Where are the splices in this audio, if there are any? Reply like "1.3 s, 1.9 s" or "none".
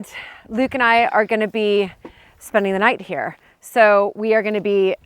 none